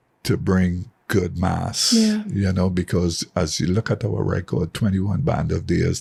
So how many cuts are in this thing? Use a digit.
0